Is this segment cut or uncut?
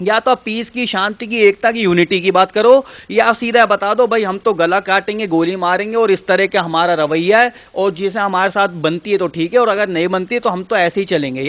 uncut